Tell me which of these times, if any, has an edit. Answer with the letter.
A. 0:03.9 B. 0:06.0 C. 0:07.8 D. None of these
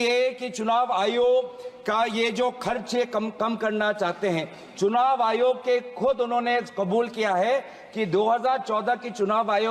D